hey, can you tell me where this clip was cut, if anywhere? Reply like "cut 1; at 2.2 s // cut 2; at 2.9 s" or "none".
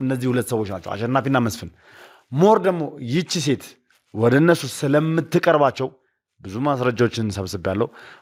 none